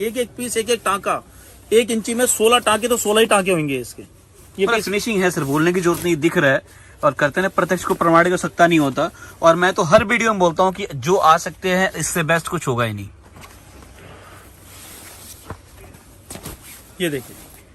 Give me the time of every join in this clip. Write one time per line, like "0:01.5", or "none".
none